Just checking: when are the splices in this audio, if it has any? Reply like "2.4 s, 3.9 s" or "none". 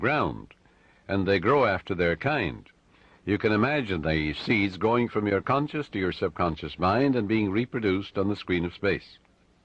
6.1 s